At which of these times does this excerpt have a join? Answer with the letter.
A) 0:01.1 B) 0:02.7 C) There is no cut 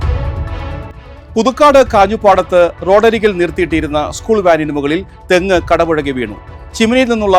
A